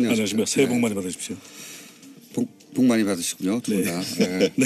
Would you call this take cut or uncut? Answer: uncut